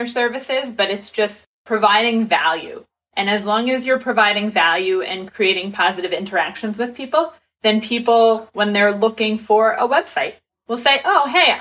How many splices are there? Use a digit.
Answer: 1